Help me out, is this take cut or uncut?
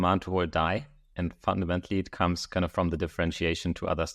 uncut